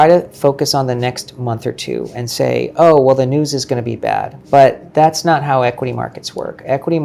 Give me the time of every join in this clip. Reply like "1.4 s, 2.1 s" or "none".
none